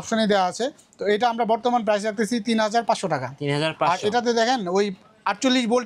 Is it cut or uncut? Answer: uncut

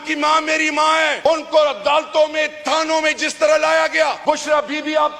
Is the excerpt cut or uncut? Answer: cut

